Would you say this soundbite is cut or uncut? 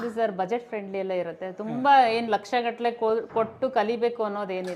uncut